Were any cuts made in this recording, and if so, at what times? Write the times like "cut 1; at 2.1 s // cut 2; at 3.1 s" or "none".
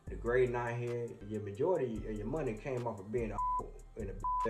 cut 1; at 1.2 s